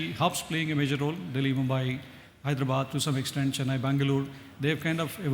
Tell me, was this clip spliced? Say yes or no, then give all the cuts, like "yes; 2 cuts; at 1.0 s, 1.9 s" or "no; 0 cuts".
no; 0 cuts